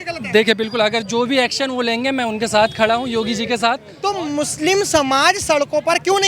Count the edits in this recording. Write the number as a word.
one